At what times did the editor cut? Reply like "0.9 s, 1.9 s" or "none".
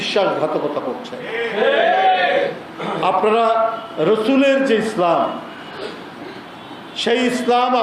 none